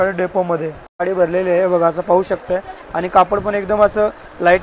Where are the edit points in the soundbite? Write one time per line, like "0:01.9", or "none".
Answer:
0:01.0